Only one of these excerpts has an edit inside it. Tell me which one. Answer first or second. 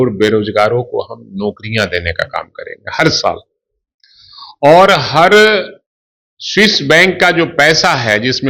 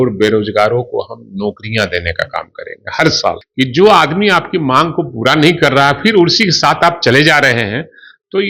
second